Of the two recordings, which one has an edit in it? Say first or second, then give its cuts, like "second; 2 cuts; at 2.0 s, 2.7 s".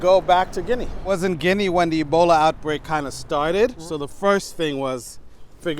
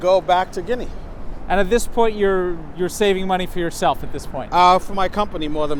first; 2 cuts; at 1.2 s, 3.8 s